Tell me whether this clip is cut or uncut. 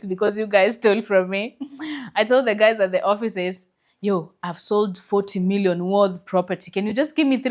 uncut